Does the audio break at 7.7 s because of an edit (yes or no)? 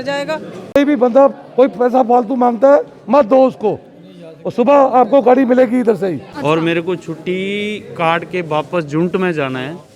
no